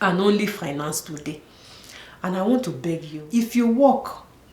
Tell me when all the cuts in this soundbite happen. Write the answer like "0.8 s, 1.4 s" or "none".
3.1 s